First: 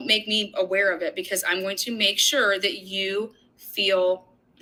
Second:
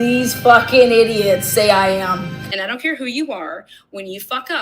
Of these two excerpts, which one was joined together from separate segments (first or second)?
second